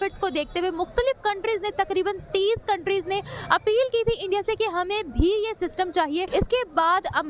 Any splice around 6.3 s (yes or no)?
yes